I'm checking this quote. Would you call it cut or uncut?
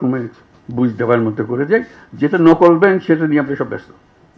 uncut